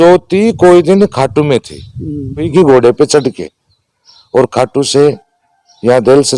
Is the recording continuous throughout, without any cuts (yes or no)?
no